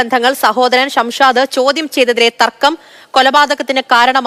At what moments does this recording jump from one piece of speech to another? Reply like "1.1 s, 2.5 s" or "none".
none